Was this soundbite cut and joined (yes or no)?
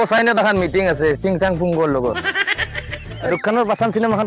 yes